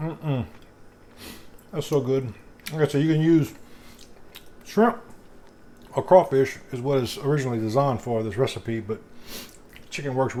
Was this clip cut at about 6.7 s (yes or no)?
no